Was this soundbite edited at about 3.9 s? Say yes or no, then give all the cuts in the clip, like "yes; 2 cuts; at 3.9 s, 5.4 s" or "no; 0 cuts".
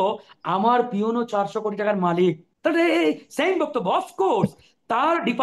no; 1 cut; at 2.5 s